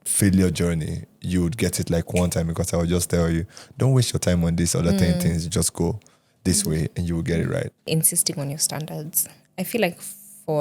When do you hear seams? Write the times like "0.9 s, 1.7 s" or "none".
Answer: 7.9 s